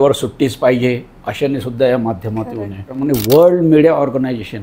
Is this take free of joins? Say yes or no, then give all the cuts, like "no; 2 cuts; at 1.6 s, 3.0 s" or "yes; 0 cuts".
no; 1 cut; at 3.0 s